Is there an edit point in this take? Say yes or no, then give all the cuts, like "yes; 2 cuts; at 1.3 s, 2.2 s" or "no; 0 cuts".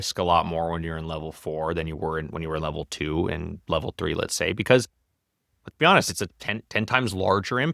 no; 0 cuts